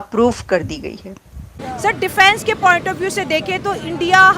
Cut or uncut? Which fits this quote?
cut